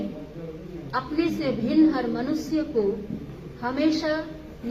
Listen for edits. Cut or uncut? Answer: uncut